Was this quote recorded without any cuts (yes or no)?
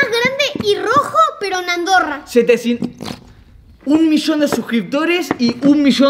no